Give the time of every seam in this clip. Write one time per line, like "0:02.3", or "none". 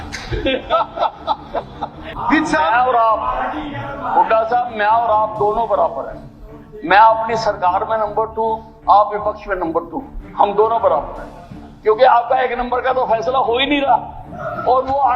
0:02.1